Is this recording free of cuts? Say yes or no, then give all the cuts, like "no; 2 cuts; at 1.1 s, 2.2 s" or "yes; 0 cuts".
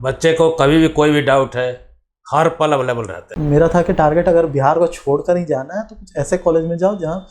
no; 1 cut; at 3.3 s